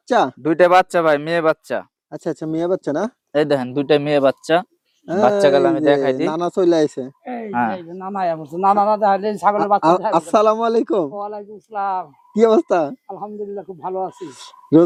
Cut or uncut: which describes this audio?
uncut